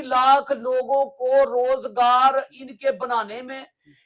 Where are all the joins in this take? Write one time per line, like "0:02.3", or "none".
none